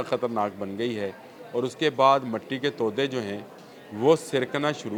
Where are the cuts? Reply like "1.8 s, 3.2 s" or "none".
none